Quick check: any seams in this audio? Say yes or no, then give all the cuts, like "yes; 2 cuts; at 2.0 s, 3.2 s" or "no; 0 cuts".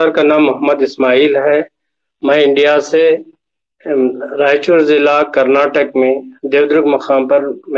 no; 0 cuts